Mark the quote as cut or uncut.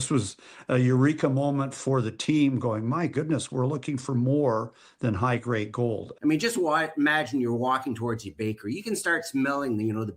cut